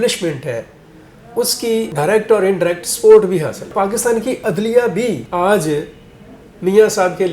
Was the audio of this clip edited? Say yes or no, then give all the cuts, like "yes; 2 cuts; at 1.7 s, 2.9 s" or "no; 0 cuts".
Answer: yes; 2 cuts; at 3.7 s, 5.2 s